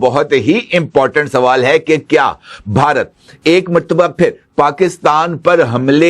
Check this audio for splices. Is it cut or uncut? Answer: uncut